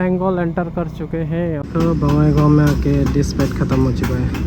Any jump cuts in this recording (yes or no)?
yes